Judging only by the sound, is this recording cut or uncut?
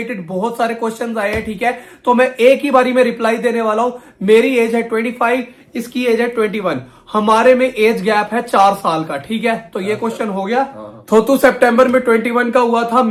uncut